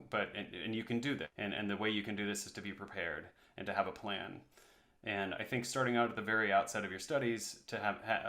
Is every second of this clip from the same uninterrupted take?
no; 1 cut; at 1.3 s

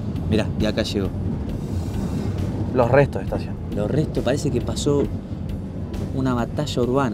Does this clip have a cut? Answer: no; 0 cuts

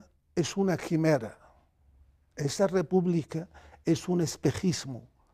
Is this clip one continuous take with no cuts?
yes; 0 cuts

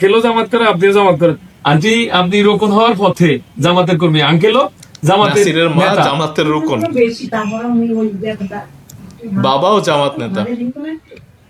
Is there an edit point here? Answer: no; 0 cuts

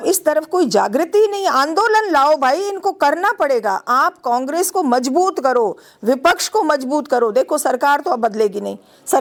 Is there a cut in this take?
no; 0 cuts

